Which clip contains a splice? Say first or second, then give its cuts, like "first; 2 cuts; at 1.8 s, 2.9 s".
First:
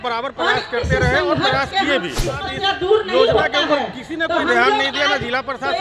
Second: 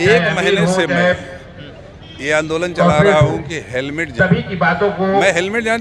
first; 1 cut; at 2.5 s